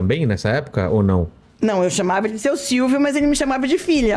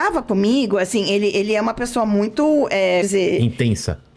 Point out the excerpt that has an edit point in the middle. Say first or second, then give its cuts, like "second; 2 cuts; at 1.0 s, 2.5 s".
second; 1 cut; at 3.1 s